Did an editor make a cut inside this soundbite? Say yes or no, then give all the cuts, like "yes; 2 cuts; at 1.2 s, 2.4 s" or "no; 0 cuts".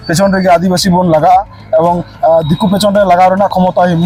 no; 0 cuts